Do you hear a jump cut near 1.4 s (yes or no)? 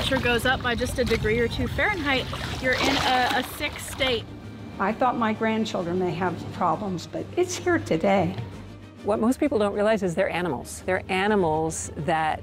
no